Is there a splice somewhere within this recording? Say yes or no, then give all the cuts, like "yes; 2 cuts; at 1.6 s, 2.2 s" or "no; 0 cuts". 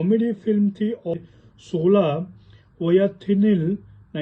yes; 1 cut; at 1.1 s